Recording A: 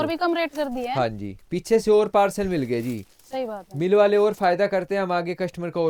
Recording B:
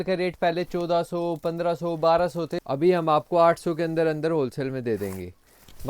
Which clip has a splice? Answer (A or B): B